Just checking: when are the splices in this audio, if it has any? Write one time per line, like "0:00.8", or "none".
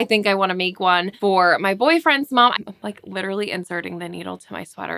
0:01.1
0:02.5